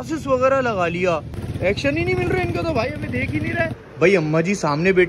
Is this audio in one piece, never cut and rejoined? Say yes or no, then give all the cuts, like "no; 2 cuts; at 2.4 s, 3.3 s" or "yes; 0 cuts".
no; 2 cuts; at 1.4 s, 3.8 s